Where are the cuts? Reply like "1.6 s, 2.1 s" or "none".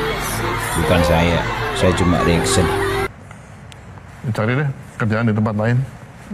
3.1 s